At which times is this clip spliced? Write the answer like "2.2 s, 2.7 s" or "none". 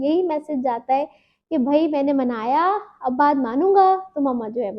none